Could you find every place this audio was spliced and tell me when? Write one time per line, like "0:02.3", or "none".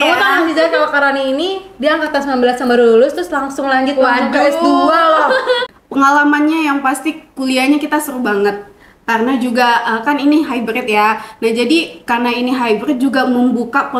0:05.6